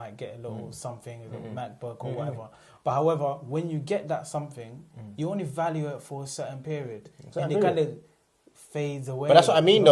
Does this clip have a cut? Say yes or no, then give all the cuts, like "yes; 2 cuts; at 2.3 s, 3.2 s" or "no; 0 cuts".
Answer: no; 0 cuts